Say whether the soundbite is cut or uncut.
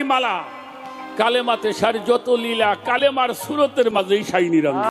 uncut